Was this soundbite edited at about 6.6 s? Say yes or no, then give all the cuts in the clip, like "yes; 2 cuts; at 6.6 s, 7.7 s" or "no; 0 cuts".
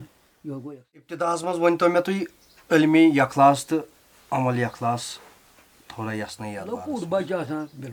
yes; 2 cuts; at 1.2 s, 6.6 s